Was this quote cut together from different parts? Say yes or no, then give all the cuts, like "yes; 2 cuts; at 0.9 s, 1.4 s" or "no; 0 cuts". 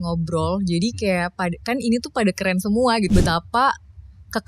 yes; 1 cut; at 3.1 s